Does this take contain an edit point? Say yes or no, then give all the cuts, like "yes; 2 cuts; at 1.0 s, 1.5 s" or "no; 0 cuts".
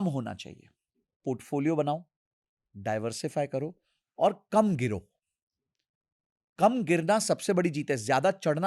yes; 1 cut; at 1.2 s